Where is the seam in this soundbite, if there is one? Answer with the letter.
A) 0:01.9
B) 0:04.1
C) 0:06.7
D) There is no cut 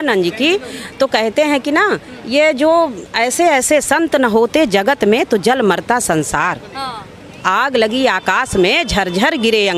D